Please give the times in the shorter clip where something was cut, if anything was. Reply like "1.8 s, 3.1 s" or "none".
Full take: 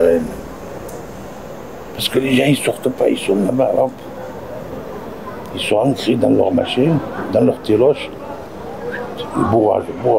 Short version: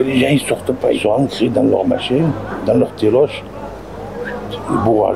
1.0 s